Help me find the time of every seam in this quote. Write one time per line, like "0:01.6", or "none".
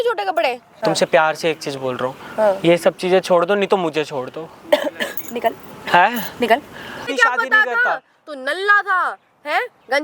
0:00.8
0:07.1

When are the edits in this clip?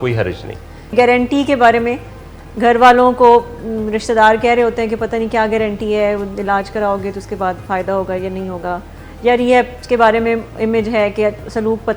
0:00.9

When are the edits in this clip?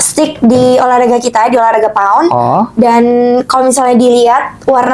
none

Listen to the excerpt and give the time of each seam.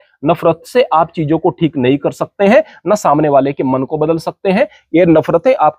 none

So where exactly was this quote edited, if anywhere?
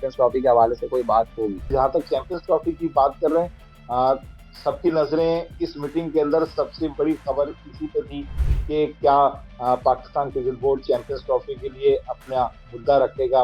0:01.7

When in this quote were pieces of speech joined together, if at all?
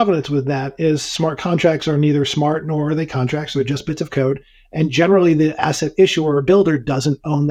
none

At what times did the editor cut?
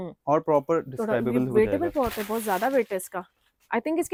none

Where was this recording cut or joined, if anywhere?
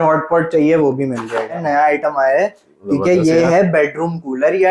0:01.6

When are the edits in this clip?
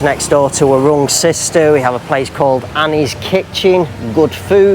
none

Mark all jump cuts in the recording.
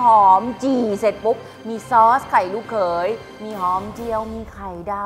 none

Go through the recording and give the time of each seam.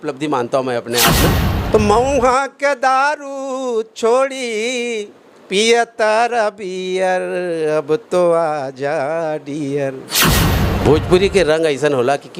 0:01.4
0:10.5

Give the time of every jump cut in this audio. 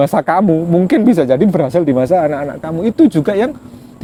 none

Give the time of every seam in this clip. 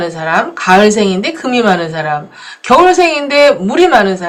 none

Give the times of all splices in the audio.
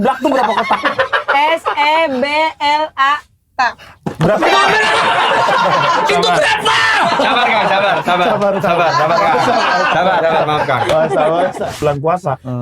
0:11.7

